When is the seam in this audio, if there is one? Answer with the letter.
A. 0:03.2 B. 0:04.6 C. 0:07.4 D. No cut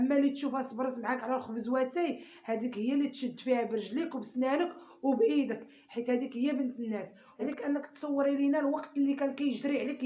C